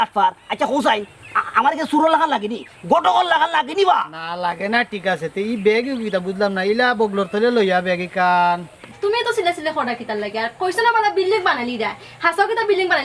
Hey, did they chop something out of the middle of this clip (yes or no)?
yes